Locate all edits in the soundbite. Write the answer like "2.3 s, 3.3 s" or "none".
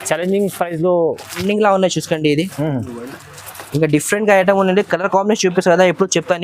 1.4 s

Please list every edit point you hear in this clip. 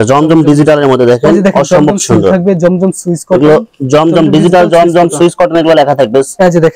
none

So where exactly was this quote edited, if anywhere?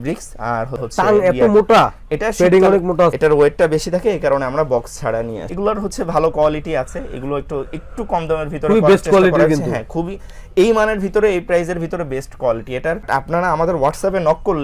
3.1 s, 5.4 s, 13.1 s

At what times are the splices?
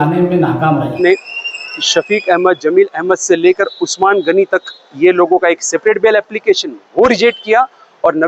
1.0 s

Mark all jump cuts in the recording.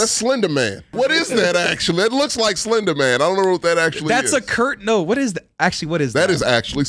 0.9 s

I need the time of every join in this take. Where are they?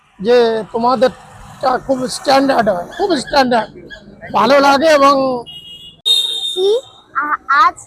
6.0 s

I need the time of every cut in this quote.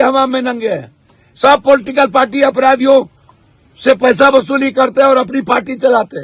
none

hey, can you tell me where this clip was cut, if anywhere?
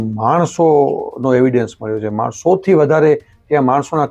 none

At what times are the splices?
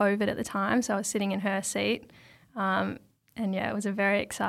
none

